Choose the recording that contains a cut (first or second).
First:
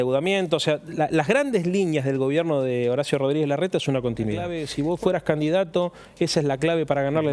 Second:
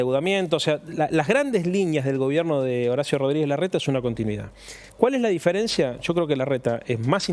first